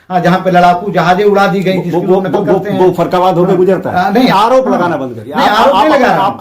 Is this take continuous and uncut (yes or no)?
no